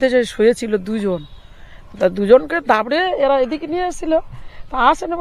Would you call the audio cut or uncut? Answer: uncut